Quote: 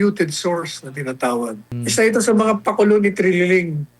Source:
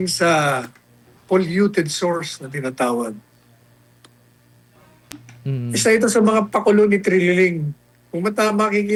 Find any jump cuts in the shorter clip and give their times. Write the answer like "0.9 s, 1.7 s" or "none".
1.7 s